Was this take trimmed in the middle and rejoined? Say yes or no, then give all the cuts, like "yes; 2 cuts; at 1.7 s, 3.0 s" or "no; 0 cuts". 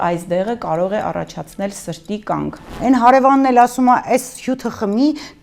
yes; 1 cut; at 2.7 s